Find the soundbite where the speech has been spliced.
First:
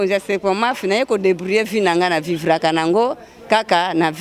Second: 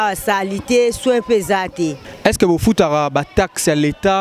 second; 1 cut; at 2.0 s

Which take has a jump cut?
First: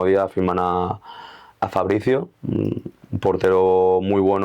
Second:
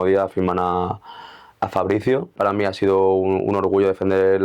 second; 1 cut; at 2.4 s

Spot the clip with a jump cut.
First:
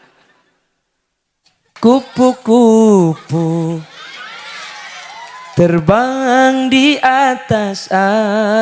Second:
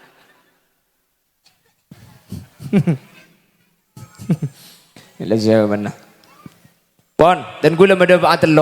first; 1 cut; at 1.7 s

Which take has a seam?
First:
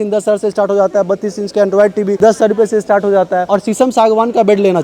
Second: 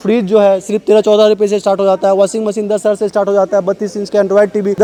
first; 1 cut; at 3.4 s

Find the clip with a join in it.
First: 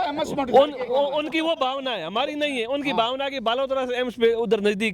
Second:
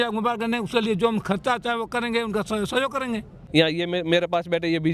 second; 1 cut; at 3.4 s

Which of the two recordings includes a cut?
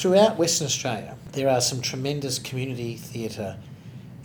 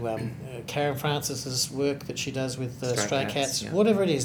first; 1 cut; at 1.2 s

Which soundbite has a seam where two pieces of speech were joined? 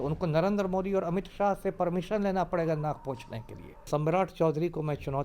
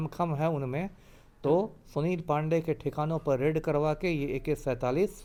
first; 1 cut; at 3.9 s

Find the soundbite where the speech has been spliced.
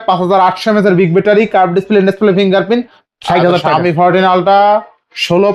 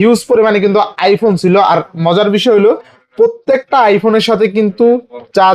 first; 1 cut; at 3.2 s

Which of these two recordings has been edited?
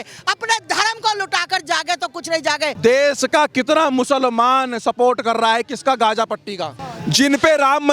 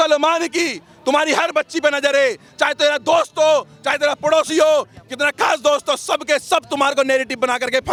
first; 2 cuts; at 2.7 s, 6.9 s

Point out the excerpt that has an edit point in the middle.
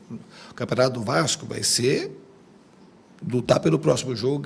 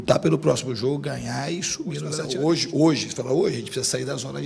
second; 1 cut; at 2.2 s

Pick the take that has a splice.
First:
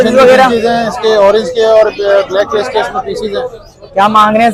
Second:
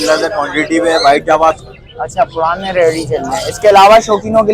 second; 1 cut; at 1.6 s

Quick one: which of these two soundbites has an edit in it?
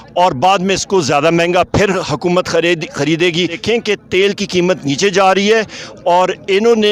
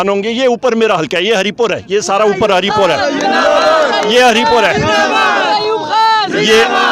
first; 1 cut; at 3.6 s

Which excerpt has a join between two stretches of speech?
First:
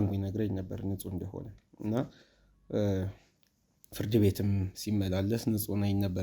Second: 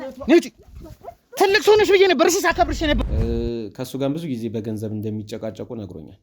second; 1 cut; at 3.1 s

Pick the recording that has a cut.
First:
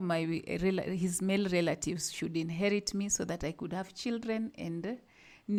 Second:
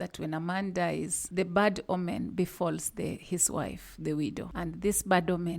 second; 2 cuts; at 1.2 s, 4.5 s

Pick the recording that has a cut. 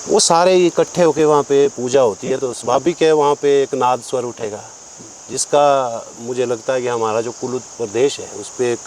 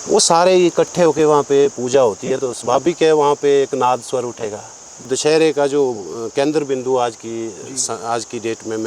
second; 1 cut; at 5.1 s

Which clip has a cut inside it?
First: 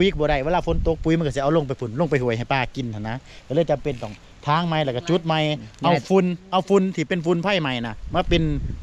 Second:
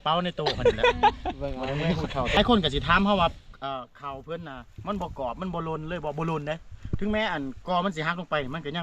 second; 1 cut; at 2.4 s

